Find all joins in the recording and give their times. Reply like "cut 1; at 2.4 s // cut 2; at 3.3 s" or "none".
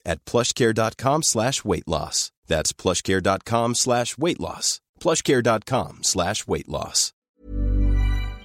cut 1; at 7.3 s